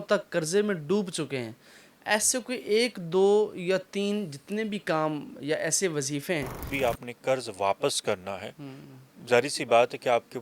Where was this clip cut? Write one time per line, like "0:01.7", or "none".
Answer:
0:06.7